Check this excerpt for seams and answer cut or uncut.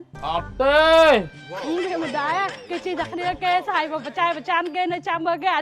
cut